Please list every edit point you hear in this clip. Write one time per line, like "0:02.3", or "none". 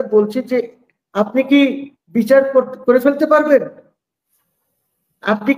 none